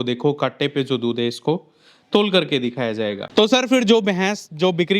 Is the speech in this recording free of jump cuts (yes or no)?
no